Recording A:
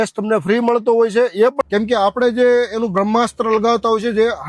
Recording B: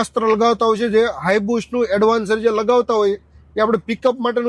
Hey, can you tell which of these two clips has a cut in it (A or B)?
A